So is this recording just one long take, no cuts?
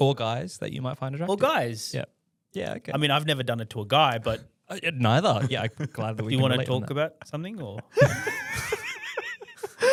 yes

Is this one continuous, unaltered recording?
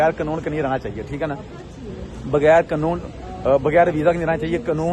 yes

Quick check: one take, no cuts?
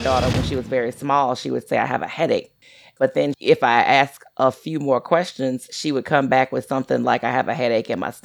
no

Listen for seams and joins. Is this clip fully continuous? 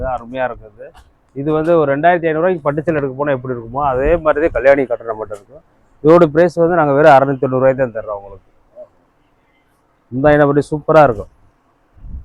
yes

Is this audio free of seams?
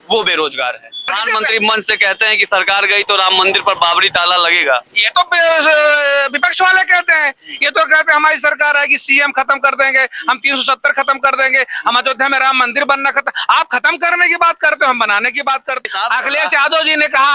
no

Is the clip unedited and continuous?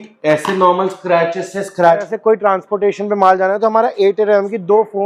no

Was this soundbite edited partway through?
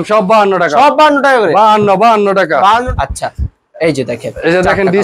yes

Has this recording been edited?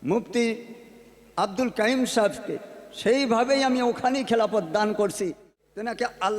yes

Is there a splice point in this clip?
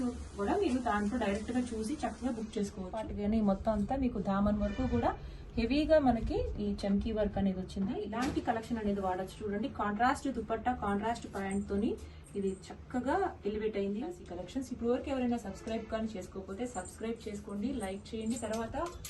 yes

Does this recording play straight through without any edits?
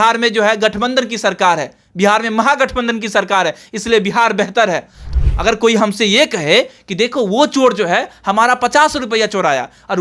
no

